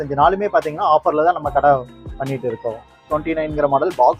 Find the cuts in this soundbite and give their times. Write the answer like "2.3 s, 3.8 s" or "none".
3.0 s